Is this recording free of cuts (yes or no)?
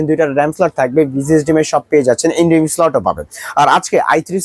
yes